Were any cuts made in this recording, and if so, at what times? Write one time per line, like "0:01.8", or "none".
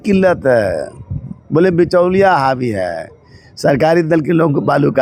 none